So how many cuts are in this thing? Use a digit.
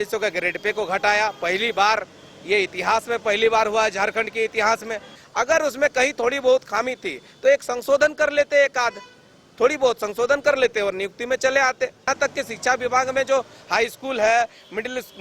2